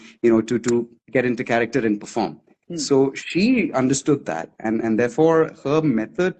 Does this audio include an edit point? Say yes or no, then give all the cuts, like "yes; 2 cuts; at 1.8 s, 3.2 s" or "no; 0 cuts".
no; 0 cuts